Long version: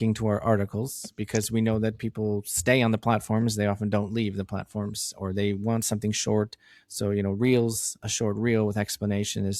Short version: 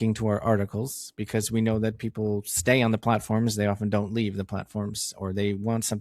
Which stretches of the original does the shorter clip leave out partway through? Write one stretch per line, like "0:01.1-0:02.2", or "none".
none